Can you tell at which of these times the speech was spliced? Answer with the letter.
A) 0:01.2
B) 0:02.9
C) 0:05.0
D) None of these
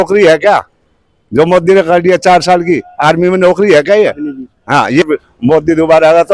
C